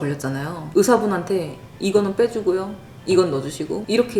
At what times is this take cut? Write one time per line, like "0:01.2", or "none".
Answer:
none